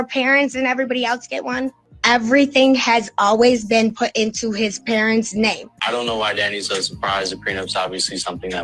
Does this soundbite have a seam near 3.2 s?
no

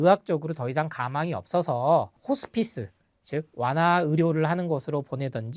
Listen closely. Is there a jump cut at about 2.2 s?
yes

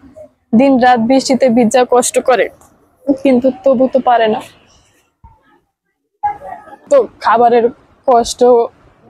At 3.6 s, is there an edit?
no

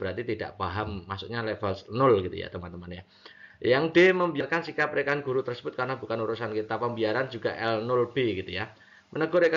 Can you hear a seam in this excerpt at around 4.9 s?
yes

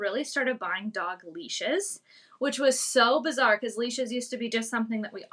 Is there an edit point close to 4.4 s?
no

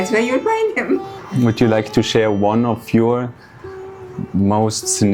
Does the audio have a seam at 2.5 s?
no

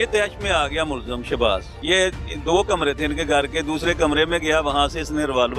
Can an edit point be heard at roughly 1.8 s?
yes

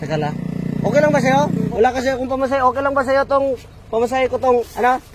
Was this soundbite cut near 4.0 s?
no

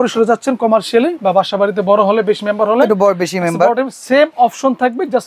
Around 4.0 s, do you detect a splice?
no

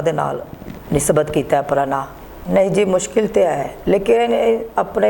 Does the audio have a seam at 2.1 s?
yes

